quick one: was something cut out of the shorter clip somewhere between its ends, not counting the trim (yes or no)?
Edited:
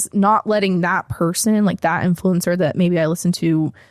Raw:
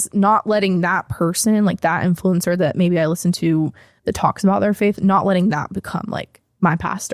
no